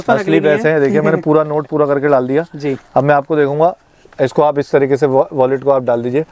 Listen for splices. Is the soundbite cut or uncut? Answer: uncut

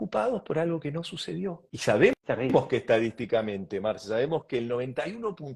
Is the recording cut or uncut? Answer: cut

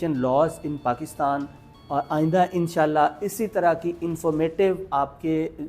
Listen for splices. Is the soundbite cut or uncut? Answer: uncut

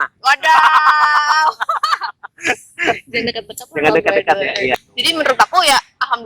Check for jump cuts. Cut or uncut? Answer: cut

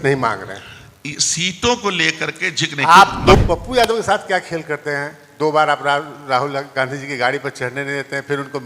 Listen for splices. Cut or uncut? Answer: cut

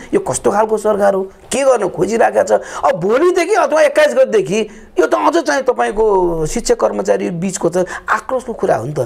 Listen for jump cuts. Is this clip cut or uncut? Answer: uncut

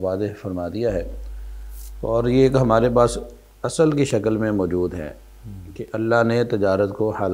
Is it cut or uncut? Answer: uncut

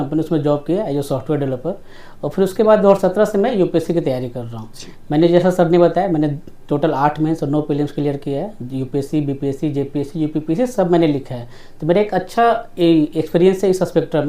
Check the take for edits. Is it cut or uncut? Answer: uncut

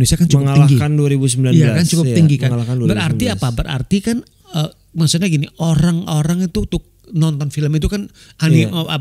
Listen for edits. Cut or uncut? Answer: uncut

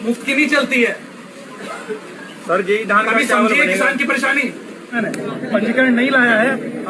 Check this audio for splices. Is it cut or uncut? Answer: cut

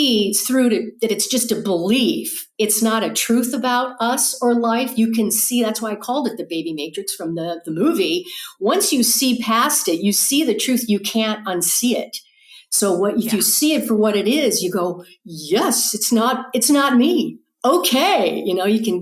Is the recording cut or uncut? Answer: cut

